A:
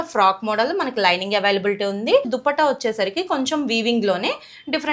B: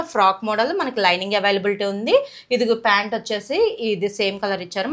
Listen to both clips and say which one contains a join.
A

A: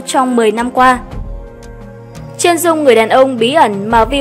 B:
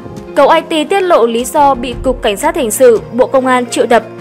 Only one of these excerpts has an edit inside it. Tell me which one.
A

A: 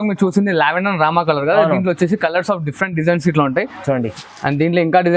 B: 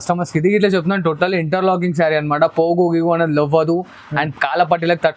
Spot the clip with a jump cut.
A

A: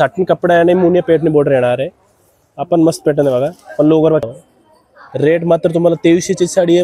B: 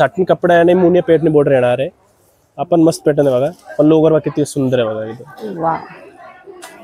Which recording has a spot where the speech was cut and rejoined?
A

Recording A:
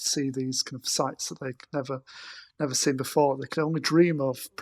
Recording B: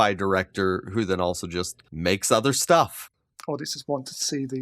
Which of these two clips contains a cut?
B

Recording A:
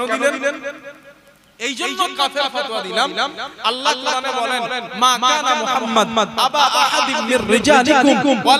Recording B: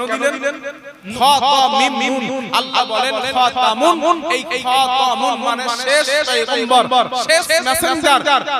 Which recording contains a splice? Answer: B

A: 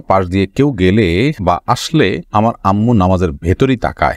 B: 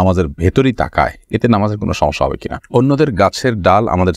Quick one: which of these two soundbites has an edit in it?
B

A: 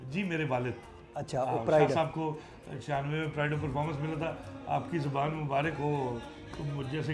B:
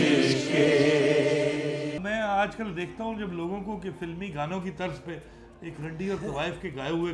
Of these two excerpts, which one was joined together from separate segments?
B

